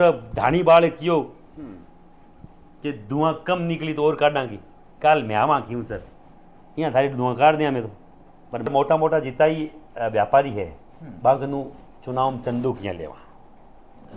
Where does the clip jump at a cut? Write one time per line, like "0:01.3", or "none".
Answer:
0:08.7